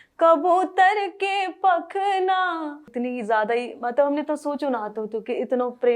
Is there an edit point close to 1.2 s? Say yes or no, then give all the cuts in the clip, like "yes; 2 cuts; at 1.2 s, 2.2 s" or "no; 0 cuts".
no; 1 cut; at 2.9 s